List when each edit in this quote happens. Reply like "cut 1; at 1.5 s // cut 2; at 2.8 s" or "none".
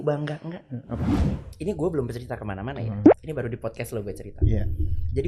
cut 1; at 1.3 s

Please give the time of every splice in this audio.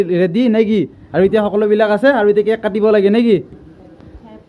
none

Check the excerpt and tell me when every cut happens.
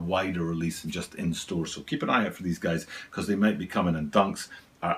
none

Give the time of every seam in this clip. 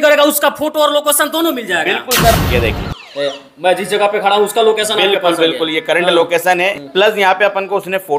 cut 1; at 2.3 s // cut 2; at 6.8 s

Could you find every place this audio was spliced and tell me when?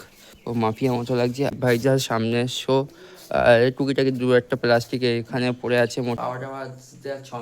cut 1; at 1.5 s // cut 2; at 6.2 s

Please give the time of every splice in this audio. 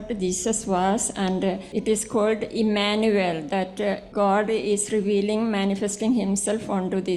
cut 1; at 1.7 s // cut 2; at 4.1 s

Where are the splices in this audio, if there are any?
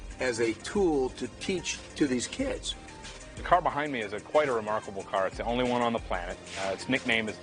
cut 1; at 1.8 s // cut 2; at 2.7 s

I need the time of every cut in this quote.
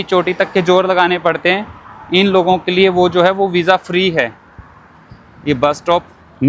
none

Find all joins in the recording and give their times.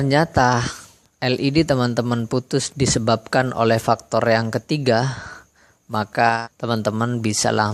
cut 1; at 6.4 s

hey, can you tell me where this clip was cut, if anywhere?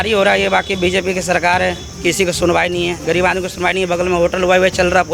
none

